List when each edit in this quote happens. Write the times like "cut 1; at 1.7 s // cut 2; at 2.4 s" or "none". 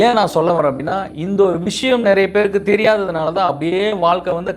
none